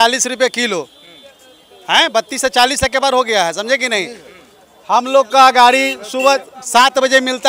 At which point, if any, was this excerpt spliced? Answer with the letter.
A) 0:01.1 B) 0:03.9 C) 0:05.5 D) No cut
D